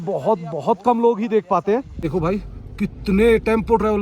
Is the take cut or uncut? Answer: cut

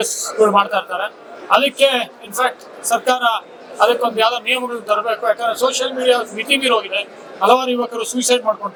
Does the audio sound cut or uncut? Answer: uncut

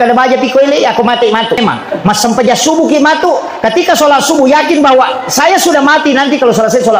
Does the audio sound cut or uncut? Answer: cut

